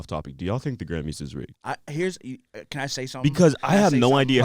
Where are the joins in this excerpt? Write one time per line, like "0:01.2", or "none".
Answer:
0:01.5